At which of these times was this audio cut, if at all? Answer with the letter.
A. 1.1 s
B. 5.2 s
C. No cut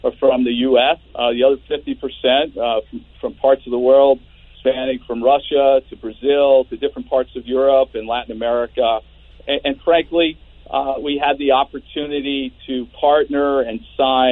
A